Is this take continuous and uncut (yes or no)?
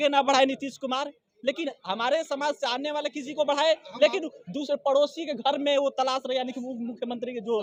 yes